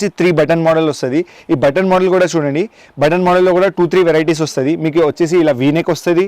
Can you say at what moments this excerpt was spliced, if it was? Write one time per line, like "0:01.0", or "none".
none